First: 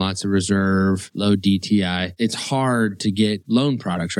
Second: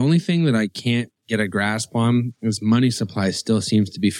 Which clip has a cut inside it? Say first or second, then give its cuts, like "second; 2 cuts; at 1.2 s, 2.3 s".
first; 3 cuts; at 1.1 s, 2.1 s, 3.4 s